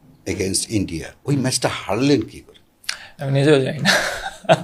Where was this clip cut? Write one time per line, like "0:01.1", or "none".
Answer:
none